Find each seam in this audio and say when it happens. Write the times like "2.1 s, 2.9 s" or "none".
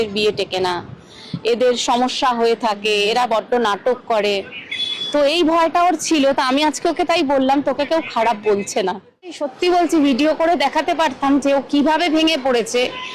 9.5 s